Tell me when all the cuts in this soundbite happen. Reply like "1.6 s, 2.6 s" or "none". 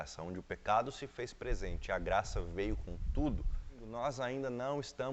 3.9 s